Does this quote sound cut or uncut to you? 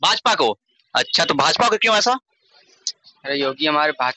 uncut